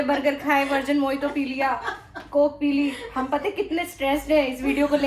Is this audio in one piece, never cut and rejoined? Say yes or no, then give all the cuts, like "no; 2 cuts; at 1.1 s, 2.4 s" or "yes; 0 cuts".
yes; 0 cuts